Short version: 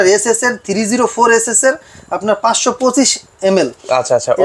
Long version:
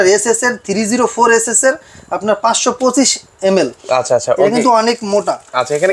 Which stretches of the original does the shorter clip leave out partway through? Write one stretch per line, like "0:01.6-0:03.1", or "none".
none